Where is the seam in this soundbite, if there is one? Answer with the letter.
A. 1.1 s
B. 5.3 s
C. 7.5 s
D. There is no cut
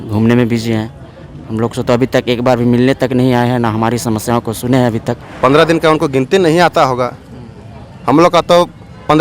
B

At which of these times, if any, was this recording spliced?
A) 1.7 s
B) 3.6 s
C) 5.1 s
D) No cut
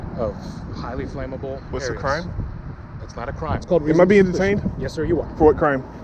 B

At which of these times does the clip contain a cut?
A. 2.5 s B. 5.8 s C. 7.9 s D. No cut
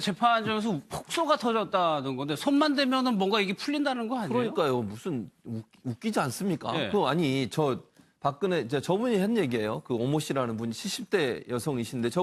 A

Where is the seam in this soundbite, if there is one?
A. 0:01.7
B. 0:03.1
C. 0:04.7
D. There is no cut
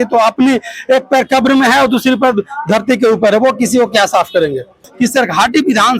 C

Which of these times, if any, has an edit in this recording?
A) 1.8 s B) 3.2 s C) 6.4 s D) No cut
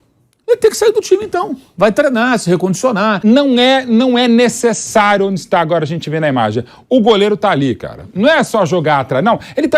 B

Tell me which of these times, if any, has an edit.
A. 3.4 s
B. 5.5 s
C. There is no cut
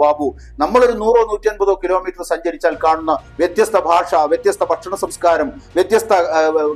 C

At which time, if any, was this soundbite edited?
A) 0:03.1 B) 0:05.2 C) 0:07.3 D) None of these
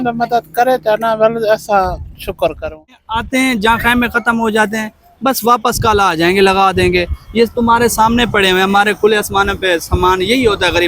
A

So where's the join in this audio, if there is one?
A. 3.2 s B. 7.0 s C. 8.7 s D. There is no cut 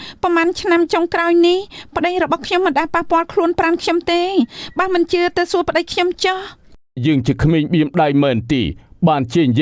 B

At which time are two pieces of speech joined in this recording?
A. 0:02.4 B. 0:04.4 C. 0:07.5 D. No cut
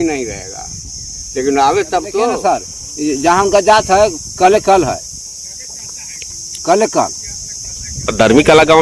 A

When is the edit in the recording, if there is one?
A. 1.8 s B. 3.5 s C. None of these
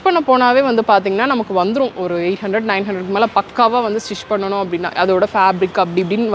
C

